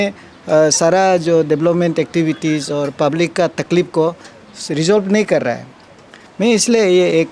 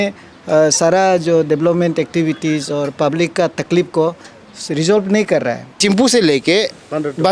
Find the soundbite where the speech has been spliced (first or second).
second